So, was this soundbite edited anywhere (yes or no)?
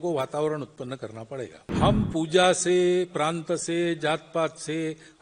yes